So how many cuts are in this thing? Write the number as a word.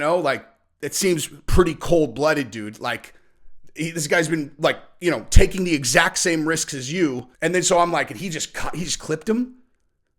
one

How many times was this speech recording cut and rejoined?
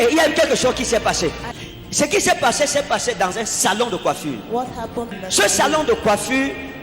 two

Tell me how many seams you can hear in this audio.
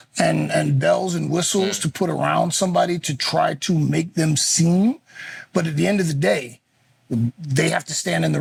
zero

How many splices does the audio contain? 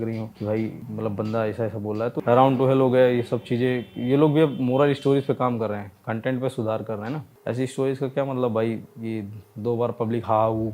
two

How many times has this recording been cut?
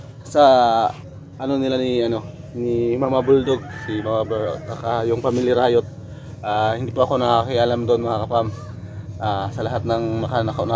zero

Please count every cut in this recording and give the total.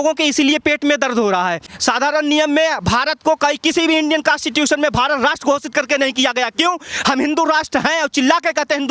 one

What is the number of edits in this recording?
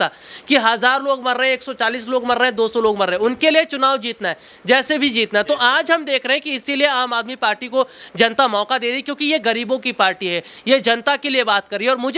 zero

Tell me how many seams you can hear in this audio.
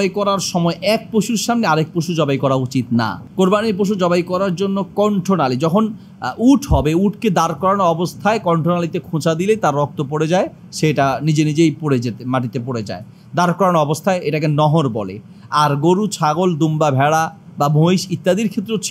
one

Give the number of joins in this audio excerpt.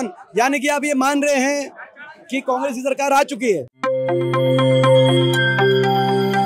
one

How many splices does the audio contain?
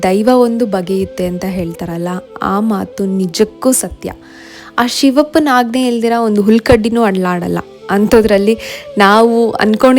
zero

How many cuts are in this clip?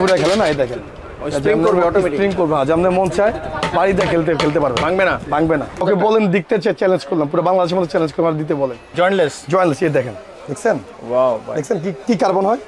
two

